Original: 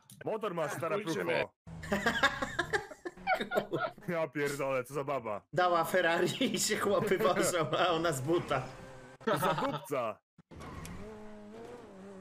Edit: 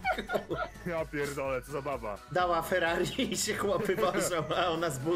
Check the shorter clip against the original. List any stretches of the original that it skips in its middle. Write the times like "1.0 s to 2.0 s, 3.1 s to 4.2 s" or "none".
none